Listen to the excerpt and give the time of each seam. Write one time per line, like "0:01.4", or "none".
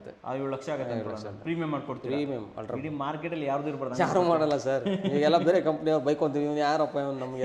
none